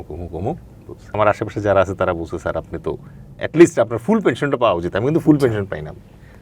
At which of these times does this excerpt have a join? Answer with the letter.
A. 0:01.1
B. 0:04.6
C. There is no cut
A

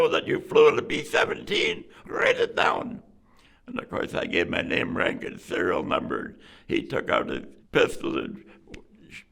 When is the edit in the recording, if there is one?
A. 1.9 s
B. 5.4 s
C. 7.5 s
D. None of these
C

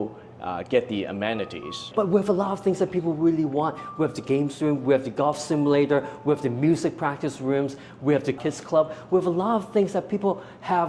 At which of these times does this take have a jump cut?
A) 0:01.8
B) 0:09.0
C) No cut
A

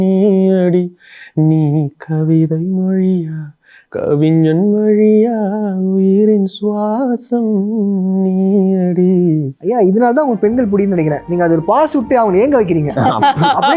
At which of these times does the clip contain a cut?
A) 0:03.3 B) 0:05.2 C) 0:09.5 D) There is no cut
C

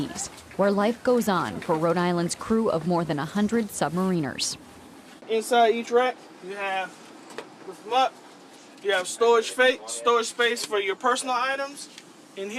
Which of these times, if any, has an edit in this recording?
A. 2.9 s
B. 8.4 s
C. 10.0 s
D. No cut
A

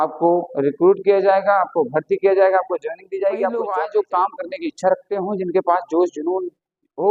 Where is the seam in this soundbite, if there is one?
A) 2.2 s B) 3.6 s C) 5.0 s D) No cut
B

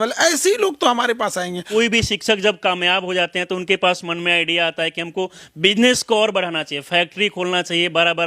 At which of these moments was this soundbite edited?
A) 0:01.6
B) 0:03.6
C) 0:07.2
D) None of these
A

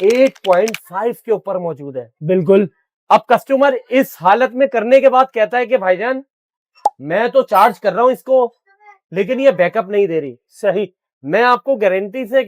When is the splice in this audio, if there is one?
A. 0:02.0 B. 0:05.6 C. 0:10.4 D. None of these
D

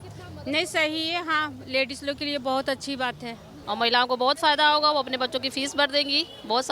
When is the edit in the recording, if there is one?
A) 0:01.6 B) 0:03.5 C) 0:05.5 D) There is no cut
B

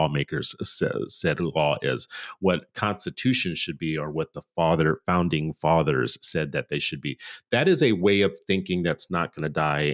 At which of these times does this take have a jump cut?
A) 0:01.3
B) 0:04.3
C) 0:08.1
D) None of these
D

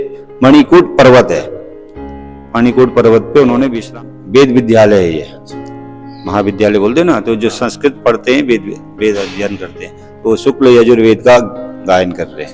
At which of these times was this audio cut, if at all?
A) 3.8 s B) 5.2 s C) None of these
A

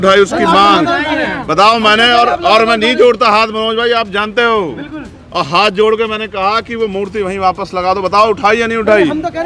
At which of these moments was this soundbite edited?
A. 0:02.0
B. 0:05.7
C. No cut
C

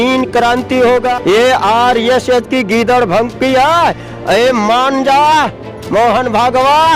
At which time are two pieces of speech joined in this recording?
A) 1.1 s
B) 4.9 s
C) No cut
A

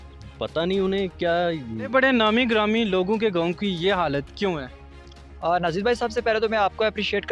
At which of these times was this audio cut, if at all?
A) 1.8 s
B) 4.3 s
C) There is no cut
A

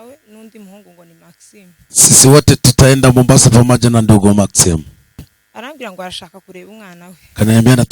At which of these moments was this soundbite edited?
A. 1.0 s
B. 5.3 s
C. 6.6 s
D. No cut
B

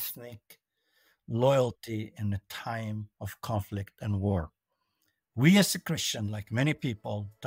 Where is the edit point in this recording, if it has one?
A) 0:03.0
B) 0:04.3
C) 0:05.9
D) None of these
D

